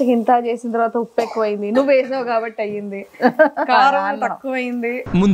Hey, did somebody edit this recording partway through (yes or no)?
no